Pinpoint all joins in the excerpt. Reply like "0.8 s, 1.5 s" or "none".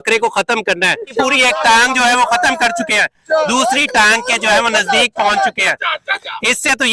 1.1 s